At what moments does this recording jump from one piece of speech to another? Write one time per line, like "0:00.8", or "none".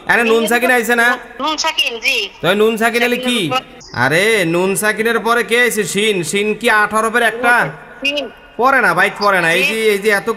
0:01.3
0:03.8